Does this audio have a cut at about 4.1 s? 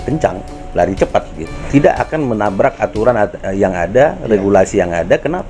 no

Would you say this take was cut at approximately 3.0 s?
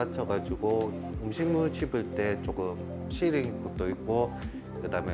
no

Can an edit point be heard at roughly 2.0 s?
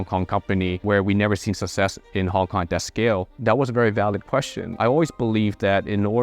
no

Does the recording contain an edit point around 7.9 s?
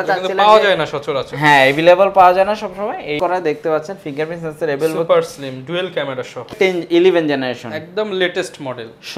no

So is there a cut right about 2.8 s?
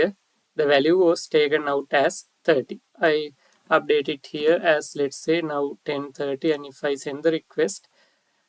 yes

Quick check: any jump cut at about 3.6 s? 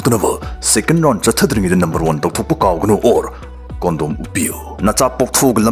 no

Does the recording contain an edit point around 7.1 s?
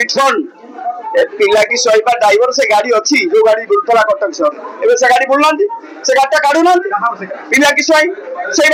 no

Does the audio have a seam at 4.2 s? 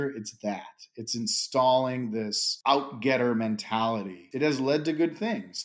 yes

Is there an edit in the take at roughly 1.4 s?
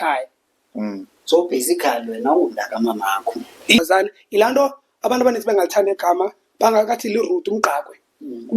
no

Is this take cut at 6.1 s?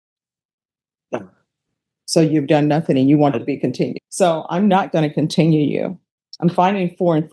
no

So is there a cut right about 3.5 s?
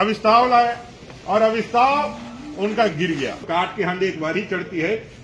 yes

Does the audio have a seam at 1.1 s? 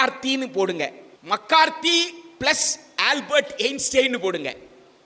yes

